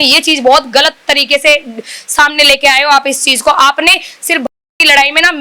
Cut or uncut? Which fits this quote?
uncut